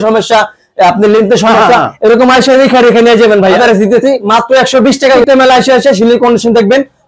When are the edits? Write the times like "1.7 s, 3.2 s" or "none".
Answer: 3.6 s, 5.2 s